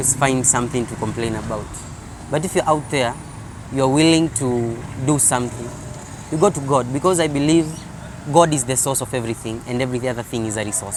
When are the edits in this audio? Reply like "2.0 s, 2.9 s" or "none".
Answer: none